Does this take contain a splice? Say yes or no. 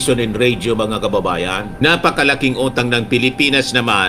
yes